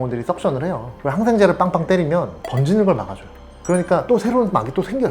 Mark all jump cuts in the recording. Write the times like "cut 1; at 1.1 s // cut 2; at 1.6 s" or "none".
cut 1; at 0.9 s // cut 2; at 2.4 s